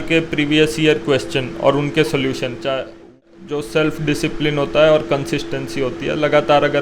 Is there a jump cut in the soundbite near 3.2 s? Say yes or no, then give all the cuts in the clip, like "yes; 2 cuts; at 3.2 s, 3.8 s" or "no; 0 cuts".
yes; 1 cut; at 3.2 s